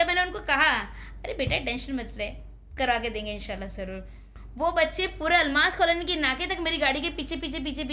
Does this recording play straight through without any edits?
yes; 0 cuts

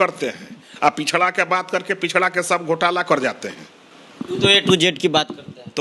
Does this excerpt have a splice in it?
no; 0 cuts

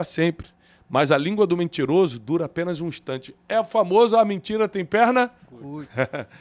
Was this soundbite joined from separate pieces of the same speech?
no; 0 cuts

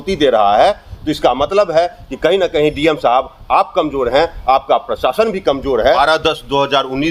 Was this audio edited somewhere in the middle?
yes; 1 cut; at 6.0 s

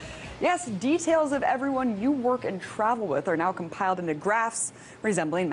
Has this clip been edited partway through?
no; 0 cuts

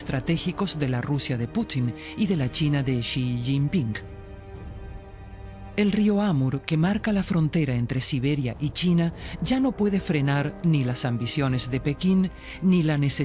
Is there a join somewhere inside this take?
yes; 1 cut; at 11.8 s

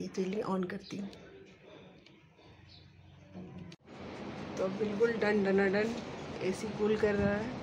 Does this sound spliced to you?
no; 0 cuts

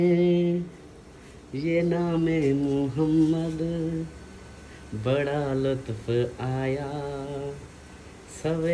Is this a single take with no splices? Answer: yes; 0 cuts

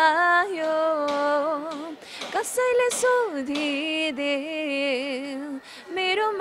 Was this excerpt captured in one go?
yes; 0 cuts

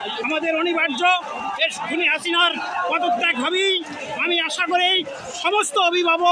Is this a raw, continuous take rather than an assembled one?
yes; 0 cuts

